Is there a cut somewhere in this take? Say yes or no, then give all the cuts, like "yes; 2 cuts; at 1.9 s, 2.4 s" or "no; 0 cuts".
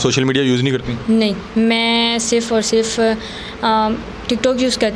no; 0 cuts